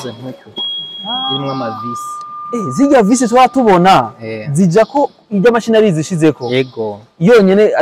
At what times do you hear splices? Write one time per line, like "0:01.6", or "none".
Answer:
none